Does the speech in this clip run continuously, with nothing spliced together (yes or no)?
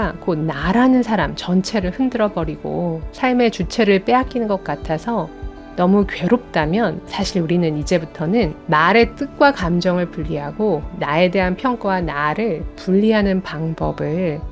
no